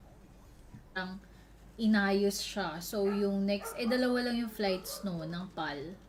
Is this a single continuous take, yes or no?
yes